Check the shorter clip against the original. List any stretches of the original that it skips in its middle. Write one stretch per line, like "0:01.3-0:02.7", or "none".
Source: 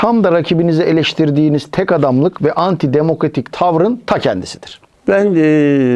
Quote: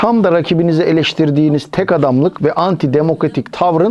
none